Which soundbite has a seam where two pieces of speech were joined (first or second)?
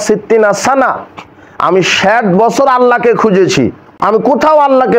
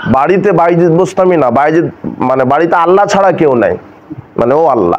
first